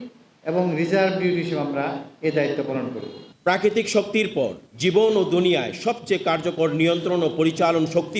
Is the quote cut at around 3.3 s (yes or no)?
yes